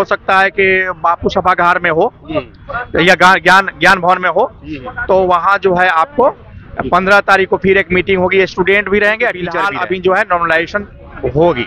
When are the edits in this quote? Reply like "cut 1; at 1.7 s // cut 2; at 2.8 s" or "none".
cut 1; at 9.6 s